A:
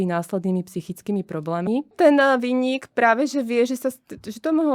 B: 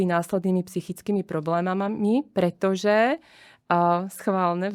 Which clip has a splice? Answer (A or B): A